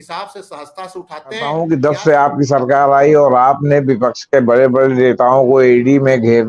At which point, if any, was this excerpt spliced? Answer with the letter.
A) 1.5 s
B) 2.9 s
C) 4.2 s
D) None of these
A